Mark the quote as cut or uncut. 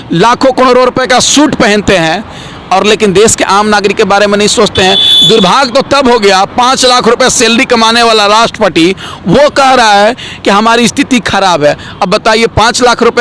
uncut